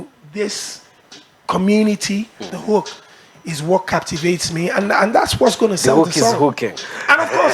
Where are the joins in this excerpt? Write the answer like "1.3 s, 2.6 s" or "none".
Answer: 2.4 s